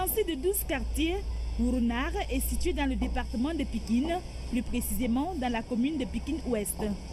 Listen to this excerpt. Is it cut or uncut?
cut